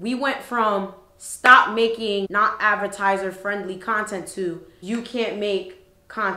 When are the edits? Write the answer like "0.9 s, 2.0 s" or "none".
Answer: none